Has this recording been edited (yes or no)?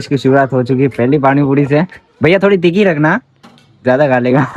no